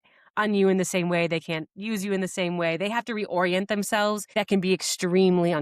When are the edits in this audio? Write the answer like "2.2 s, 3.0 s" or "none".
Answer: 4.2 s